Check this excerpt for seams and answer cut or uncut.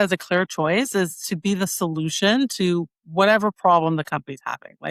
uncut